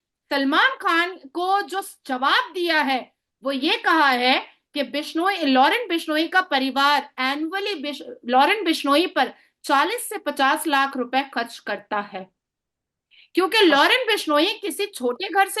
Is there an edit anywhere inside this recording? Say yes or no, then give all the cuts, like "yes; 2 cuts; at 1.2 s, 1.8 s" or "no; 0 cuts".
no; 0 cuts